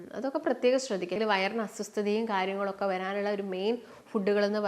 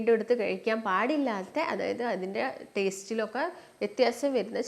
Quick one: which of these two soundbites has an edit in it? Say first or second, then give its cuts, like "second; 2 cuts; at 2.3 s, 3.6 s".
first; 1 cut; at 1.2 s